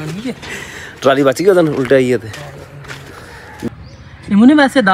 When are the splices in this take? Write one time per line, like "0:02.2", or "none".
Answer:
0:03.7